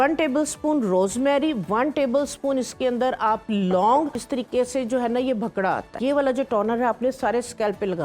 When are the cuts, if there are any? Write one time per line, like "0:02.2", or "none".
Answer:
0:04.3
0:05.9